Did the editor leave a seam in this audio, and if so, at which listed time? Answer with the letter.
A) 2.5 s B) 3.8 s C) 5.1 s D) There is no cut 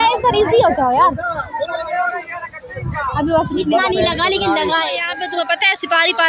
C